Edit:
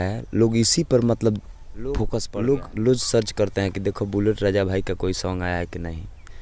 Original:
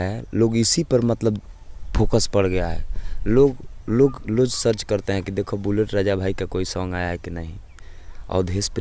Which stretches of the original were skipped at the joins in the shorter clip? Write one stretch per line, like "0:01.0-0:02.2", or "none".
0:02.2-0:03.7

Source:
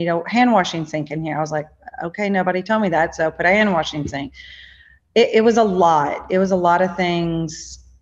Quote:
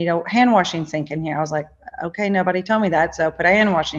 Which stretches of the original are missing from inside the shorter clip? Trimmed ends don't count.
none

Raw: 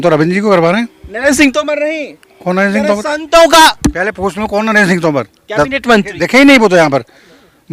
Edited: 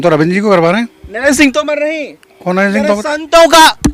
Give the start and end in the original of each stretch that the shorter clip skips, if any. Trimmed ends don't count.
none

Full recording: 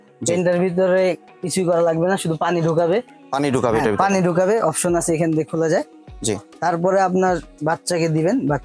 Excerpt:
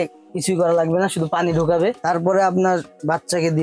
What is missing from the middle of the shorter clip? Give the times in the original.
0:03.1-0:06.6

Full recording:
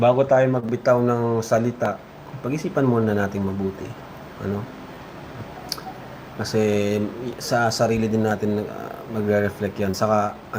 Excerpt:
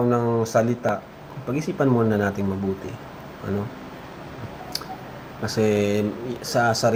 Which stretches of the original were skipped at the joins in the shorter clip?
none

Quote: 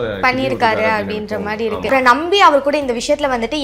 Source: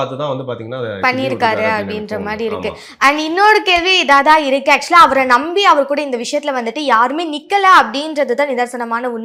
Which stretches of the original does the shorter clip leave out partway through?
0:02.7-0:05.1

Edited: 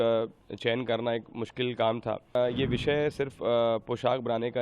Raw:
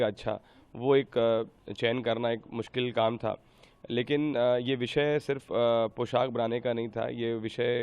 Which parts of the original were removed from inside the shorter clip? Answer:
0:03.5-0:04.4

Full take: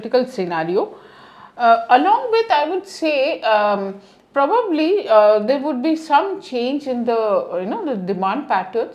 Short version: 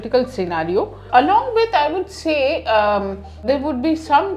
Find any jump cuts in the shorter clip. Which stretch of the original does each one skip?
0:01.1-0:01.8
0:04.2-0:05.4

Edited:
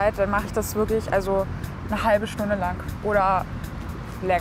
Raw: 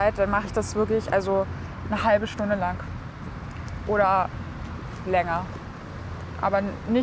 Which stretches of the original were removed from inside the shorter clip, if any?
0:02.9-0:03.7

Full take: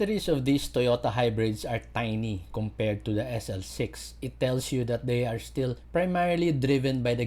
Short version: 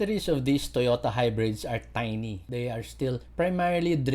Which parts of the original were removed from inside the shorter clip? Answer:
0:02.5-0:05.0

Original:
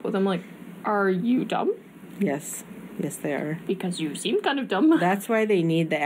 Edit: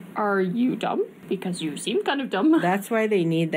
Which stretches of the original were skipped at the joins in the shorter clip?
0:01.9-0:03.6

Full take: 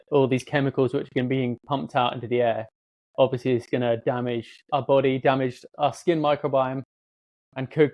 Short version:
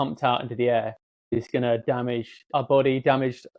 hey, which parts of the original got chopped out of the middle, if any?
0:03.1-0:03.6

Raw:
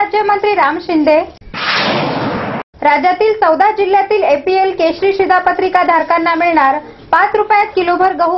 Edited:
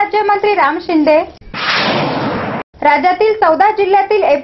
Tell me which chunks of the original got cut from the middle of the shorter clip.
none

